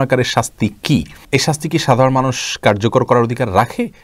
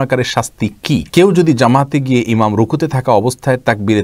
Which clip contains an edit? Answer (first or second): second